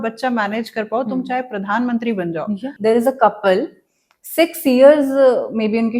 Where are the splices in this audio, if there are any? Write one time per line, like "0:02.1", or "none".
0:02.7